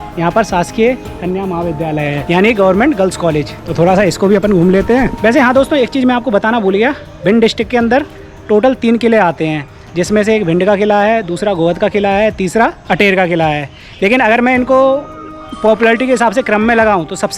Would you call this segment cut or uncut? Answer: uncut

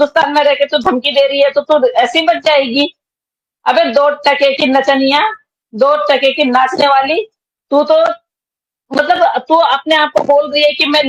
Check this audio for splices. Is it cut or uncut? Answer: uncut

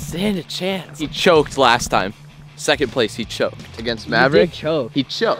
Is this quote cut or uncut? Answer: uncut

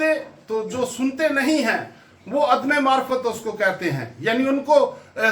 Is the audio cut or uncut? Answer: uncut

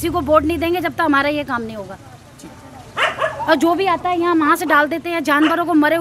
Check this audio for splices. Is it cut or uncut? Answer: uncut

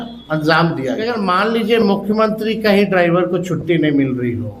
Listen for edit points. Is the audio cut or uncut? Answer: cut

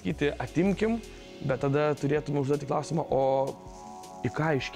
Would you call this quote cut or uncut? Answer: uncut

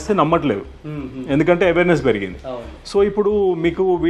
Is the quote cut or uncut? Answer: uncut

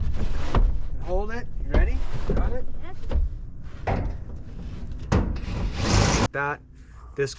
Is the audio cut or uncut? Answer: cut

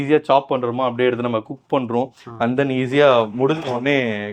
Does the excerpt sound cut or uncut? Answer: uncut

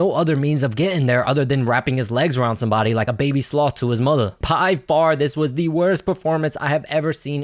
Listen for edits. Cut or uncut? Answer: cut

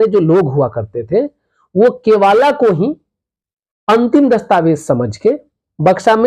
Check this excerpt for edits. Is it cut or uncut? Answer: uncut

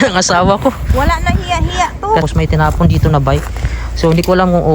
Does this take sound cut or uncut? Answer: cut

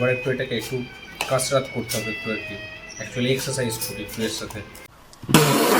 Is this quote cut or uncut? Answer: uncut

